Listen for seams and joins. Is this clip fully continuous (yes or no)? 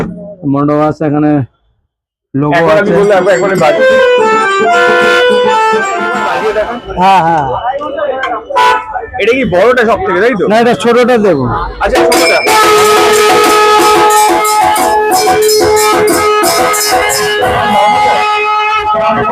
no